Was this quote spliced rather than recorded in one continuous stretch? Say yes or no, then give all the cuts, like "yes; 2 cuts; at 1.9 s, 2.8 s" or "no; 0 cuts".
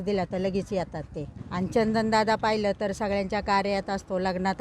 yes; 1 cut; at 1.4 s